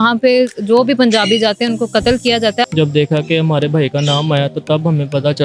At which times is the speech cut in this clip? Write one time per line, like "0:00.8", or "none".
0:02.7